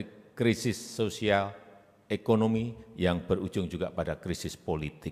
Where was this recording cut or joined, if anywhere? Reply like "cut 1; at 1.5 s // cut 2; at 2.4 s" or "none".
none

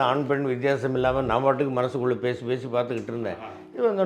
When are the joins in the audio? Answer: none

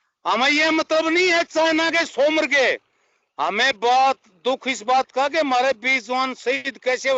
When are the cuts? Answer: none

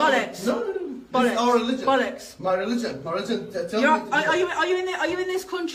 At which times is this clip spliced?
none

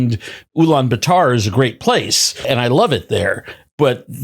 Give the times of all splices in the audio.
cut 1; at 2.5 s

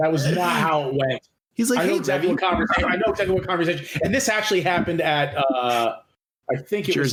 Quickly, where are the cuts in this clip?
none

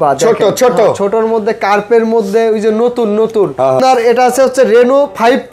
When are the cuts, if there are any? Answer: cut 1; at 3.8 s

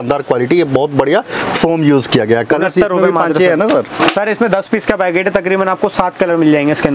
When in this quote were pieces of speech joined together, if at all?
none

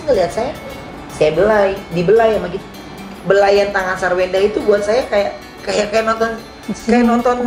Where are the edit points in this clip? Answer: cut 1; at 1.0 s

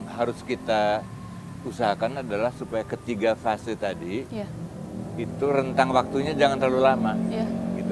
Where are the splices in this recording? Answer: none

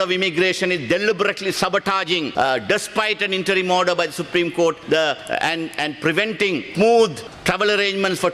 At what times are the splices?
cut 1; at 2.3 s

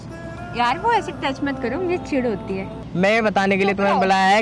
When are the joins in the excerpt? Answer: cut 1; at 2.8 s

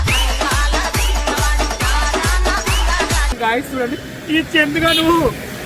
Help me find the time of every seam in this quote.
cut 1; at 3.4 s

